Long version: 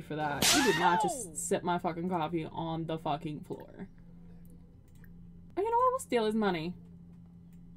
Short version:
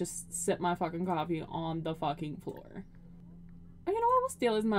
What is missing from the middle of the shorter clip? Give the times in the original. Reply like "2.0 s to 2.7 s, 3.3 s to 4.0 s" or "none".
4.8 s to 5.4 s